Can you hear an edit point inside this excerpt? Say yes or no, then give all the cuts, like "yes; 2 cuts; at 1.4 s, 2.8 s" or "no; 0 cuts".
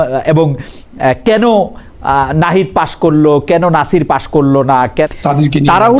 yes; 1 cut; at 5.1 s